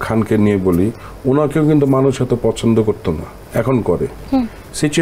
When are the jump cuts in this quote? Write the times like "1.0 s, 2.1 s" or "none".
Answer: none